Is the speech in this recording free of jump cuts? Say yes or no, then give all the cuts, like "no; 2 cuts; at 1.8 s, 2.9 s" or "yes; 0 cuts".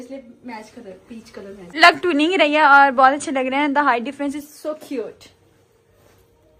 yes; 0 cuts